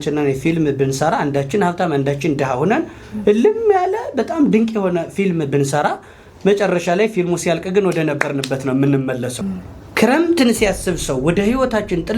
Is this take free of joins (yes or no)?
no